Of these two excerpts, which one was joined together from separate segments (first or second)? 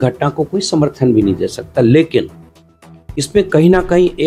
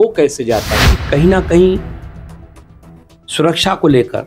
second